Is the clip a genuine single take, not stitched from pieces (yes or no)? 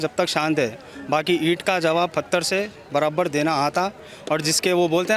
yes